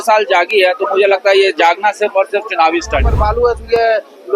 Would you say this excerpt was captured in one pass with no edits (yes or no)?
no